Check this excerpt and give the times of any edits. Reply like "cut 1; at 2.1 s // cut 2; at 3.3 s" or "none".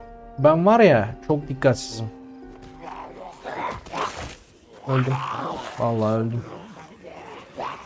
cut 1; at 2.7 s